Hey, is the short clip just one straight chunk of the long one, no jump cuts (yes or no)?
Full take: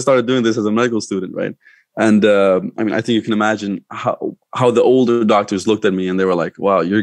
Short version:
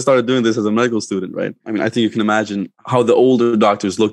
no